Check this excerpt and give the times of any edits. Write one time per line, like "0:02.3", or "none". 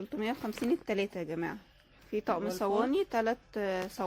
0:02.0